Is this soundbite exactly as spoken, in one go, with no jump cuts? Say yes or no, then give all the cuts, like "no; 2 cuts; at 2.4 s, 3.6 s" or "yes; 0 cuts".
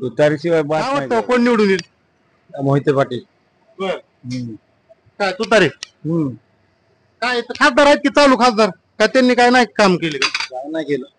no; 1 cut; at 1.0 s